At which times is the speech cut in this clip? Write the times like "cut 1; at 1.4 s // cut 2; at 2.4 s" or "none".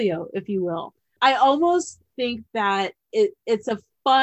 none